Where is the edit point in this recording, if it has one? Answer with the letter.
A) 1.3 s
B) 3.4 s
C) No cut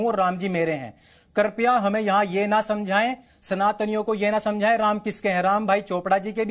C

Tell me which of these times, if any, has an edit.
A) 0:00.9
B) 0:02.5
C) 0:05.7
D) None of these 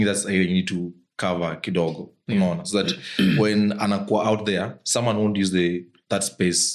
D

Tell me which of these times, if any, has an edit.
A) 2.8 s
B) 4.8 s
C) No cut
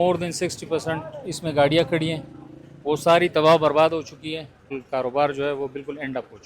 B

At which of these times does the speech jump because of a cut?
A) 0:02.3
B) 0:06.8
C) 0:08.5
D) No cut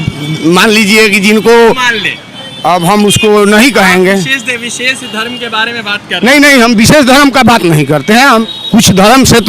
C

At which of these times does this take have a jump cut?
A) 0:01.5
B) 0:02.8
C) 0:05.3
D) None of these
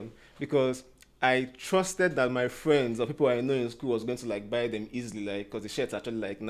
D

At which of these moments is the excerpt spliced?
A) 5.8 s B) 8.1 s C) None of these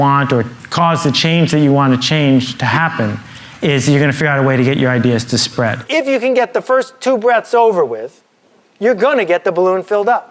A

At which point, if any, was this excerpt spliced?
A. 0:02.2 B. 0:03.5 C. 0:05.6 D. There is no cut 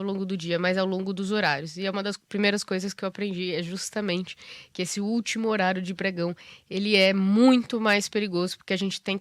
D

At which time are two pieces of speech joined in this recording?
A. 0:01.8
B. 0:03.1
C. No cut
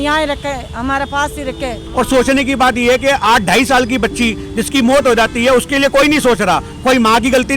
A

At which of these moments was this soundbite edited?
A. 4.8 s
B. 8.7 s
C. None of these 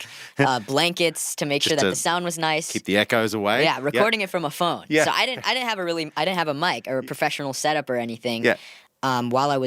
B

